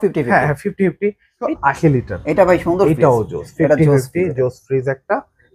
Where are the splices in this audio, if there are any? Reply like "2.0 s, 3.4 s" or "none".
1.5 s